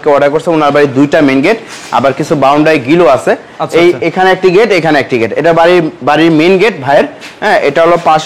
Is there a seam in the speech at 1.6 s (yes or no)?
no